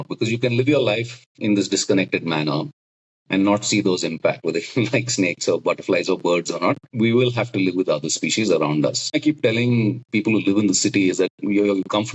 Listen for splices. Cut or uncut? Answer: cut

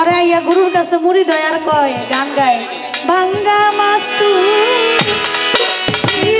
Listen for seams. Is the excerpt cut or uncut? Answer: uncut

